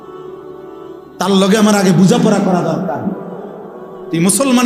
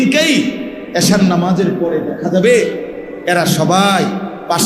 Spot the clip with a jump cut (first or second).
first